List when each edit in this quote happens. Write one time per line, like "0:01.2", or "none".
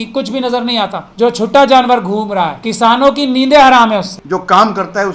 0:01.0
0:02.6
0:04.2